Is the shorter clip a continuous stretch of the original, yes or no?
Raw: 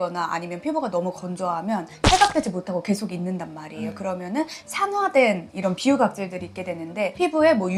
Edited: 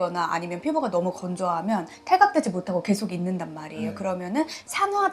yes